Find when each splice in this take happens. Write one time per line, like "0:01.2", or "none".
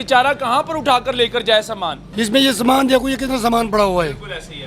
0:02.0